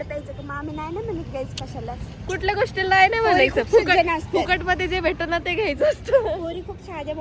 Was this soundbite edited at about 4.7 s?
no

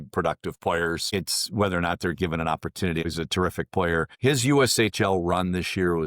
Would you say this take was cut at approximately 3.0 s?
yes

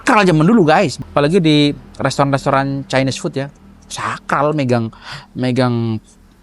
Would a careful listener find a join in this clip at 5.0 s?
no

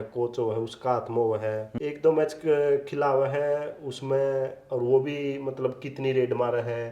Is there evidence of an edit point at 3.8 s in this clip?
no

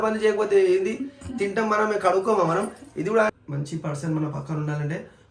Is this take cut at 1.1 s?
no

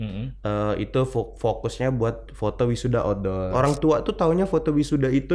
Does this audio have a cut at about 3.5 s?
yes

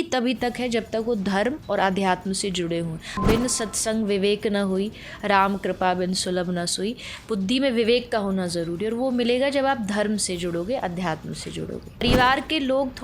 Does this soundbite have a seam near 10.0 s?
no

